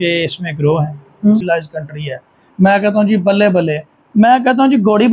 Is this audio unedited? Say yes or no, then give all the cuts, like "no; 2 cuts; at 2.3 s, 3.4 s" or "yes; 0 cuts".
no; 1 cut; at 1.4 s